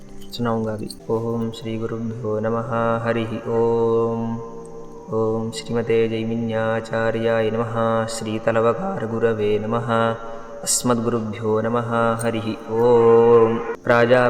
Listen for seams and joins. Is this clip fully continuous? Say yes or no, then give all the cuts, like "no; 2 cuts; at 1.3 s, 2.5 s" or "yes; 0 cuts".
no; 1 cut; at 1.0 s